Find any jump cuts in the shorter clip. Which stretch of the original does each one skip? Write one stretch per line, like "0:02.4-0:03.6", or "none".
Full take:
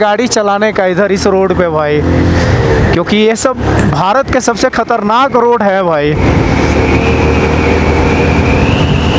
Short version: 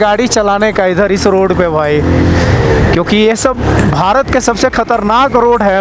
none